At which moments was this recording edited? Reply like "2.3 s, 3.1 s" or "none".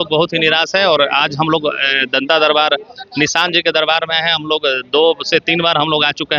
none